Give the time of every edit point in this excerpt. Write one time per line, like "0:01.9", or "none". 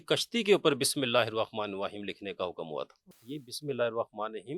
0:03.1